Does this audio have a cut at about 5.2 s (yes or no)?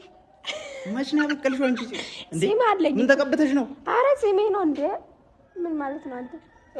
no